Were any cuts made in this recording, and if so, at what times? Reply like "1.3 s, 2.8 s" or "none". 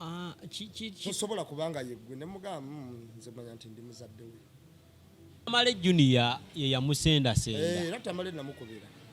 5.5 s